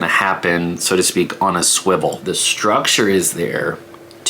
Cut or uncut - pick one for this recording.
cut